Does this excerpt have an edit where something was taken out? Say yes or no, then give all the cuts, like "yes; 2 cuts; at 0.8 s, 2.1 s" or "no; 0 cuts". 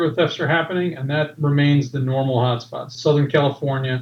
no; 0 cuts